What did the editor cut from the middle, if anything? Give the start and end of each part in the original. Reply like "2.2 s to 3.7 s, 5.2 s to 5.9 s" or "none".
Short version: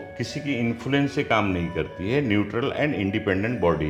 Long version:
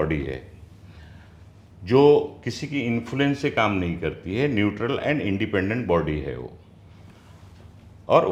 none

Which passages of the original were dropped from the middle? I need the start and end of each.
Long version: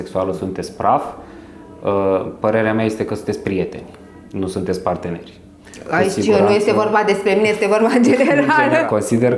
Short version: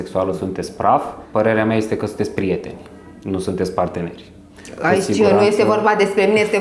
1.2 s to 2.3 s

